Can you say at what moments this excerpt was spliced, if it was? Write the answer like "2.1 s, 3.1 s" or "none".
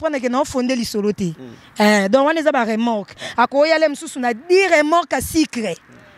none